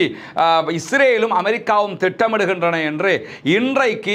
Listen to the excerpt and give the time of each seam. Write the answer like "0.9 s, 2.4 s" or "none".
none